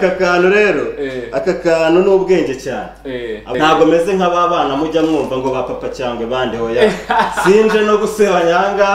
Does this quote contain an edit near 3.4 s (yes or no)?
yes